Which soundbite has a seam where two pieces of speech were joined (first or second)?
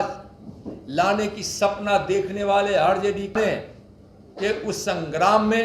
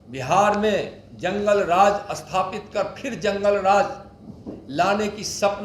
first